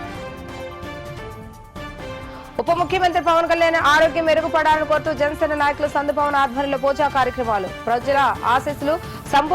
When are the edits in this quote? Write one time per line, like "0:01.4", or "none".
0:00.9